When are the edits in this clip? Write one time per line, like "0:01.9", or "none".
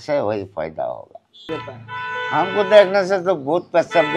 0:01.5